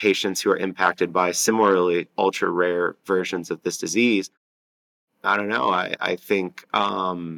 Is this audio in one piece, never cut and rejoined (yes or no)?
no